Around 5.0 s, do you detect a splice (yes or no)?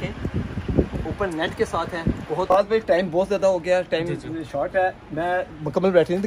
no